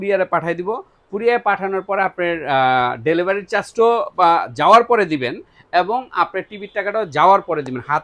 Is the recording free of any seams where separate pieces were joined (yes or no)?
yes